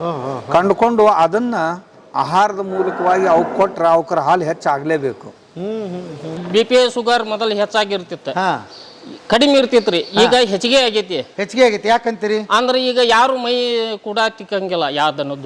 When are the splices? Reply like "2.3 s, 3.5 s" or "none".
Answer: 6.4 s